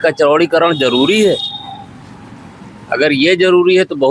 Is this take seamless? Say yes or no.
yes